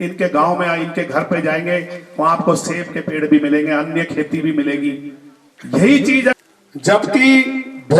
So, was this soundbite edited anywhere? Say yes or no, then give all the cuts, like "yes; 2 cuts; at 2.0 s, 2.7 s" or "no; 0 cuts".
yes; 1 cut; at 6.4 s